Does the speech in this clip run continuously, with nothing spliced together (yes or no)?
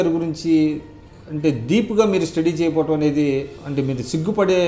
no